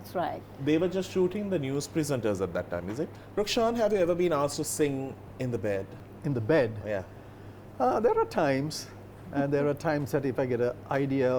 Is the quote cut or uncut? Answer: cut